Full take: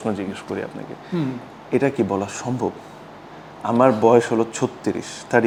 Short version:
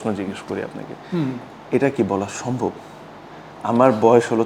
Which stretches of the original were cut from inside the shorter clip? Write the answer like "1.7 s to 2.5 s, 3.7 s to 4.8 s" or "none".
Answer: none